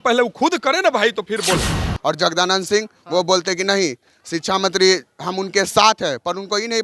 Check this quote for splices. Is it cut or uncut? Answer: cut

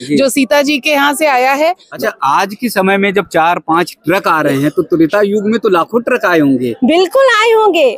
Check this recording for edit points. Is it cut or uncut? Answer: cut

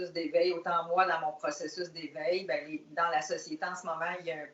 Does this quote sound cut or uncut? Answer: uncut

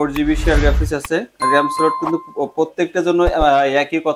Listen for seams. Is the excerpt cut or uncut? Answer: uncut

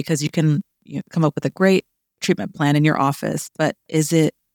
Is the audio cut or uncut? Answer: uncut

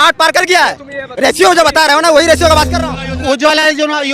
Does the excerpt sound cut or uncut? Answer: cut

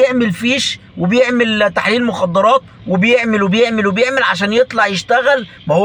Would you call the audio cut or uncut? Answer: uncut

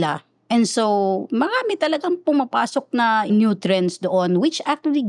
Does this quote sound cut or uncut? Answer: cut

